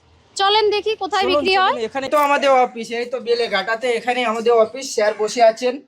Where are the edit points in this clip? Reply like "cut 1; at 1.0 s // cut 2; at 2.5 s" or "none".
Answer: cut 1; at 1.5 s